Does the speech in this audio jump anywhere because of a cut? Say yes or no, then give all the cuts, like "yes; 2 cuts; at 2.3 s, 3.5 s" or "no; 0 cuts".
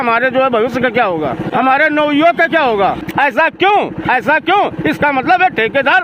yes; 2 cuts; at 1.5 s, 3.0 s